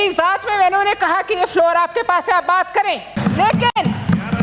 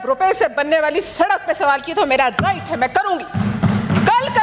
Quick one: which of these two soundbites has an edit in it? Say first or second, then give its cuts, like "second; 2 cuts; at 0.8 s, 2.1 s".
first; 1 cut; at 3.2 s